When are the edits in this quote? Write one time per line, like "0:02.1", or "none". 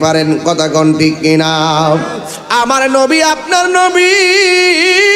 0:02.4